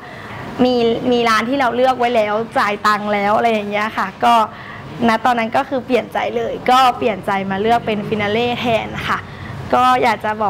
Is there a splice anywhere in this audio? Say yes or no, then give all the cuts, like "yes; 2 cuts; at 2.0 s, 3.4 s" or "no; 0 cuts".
no; 0 cuts